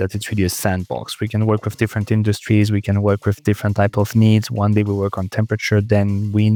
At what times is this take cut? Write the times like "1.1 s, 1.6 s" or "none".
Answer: none